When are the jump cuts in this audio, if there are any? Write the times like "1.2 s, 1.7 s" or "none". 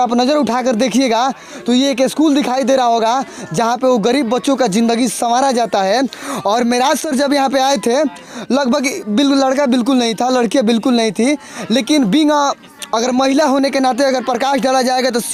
none